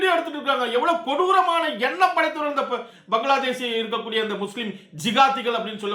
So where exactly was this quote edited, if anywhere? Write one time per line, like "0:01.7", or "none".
none